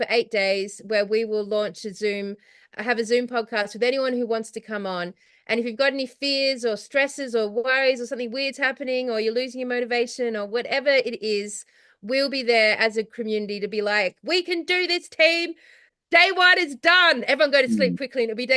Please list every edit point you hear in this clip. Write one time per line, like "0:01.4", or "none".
none

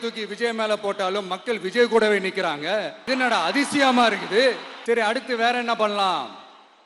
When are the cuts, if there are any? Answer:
0:03.0
0:04.7

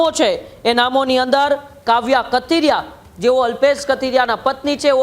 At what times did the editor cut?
none

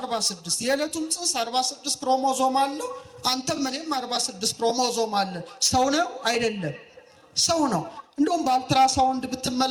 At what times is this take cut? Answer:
none

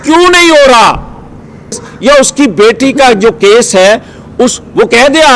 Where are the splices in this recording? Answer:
0:01.7

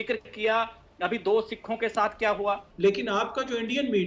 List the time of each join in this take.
0:02.7

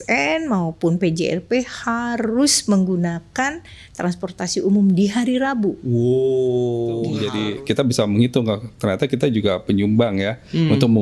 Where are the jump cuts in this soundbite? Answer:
0:07.2

